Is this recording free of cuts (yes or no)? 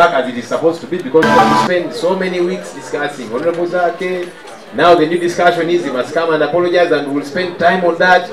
no